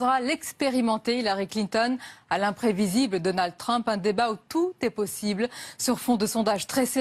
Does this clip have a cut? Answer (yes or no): no